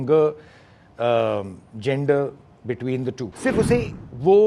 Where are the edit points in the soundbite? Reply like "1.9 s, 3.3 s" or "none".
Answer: 3.3 s